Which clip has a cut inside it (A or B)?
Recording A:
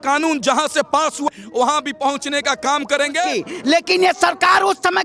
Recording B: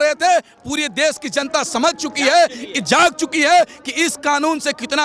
A